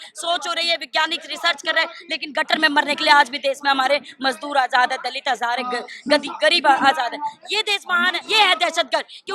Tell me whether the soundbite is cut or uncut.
cut